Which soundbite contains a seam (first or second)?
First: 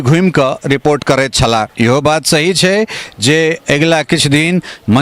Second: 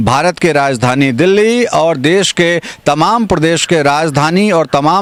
first